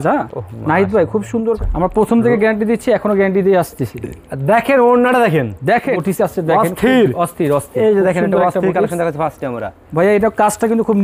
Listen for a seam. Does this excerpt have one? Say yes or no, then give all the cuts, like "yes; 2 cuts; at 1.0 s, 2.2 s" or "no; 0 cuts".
yes; 2 cuts; at 1.6 s, 6.0 s